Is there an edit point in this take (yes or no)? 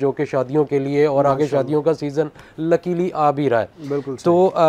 no